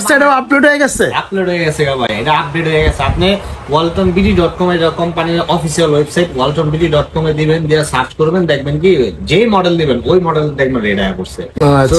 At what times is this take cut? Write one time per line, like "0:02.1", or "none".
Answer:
none